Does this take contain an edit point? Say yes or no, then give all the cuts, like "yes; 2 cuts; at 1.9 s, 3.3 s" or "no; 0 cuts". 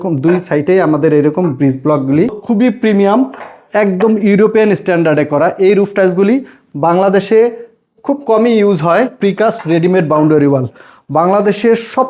yes; 2 cuts; at 2.4 s, 9.2 s